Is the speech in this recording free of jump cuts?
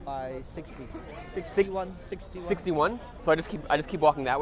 no; 1 cut; at 3.1 s

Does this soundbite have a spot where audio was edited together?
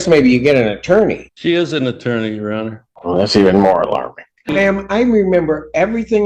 yes; 3 cuts; at 1.3 s, 2.9 s, 4.5 s

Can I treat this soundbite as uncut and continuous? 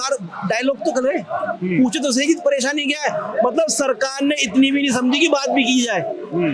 yes; 0 cuts

